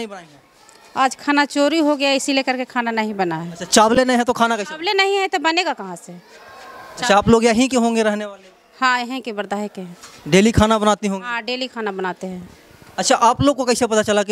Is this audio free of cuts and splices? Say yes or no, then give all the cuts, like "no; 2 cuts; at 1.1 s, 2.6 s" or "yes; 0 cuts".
yes; 0 cuts